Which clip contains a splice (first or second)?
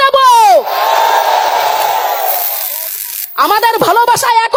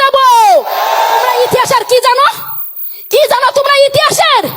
second